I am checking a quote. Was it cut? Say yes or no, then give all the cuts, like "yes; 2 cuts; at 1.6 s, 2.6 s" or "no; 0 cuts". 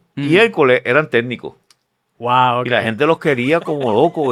no; 0 cuts